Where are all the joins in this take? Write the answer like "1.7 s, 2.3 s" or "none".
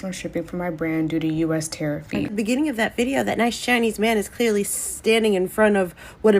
2.3 s